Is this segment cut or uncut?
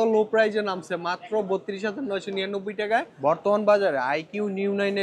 cut